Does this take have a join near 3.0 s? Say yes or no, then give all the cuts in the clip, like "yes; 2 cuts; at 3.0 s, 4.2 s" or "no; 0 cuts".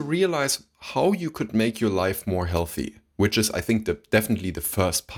no; 0 cuts